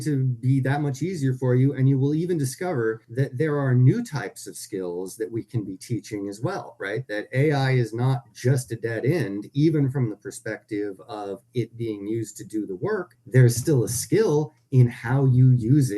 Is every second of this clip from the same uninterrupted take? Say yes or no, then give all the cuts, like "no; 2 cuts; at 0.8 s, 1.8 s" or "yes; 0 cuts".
no; 2 cuts; at 3.1 s, 13.2 s